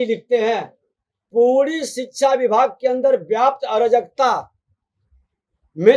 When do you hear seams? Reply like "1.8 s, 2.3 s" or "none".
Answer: 1.2 s